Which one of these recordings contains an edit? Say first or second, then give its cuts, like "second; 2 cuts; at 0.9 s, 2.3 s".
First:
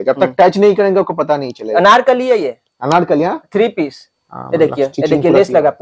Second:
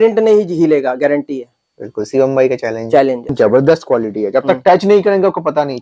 second; 1 cut; at 3.3 s